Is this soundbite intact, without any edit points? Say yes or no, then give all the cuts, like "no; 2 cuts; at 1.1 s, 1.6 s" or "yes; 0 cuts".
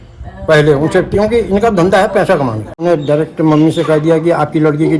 no; 1 cut; at 2.8 s